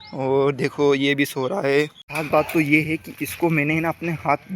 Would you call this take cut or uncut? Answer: cut